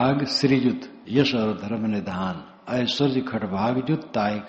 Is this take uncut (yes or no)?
no